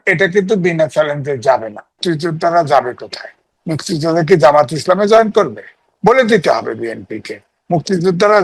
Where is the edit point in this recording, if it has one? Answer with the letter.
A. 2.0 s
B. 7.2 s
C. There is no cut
A